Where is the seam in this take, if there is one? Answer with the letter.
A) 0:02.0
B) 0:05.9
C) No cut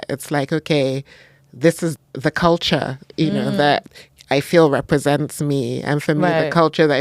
A